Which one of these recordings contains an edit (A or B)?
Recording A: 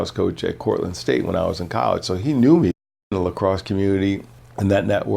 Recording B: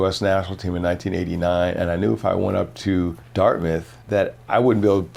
A